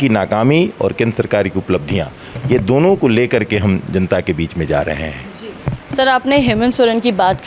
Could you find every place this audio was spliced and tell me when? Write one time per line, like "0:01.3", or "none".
none